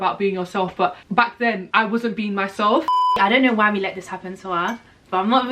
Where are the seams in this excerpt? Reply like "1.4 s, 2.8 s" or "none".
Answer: 1.3 s, 2.9 s